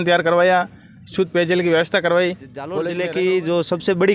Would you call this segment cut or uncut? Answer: cut